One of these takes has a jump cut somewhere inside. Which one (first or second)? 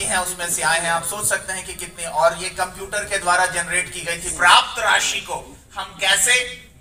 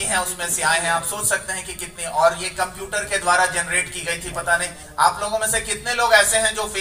first